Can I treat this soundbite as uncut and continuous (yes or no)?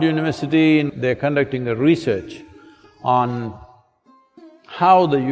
no